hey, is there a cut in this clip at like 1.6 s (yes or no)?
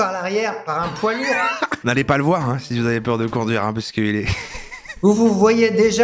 yes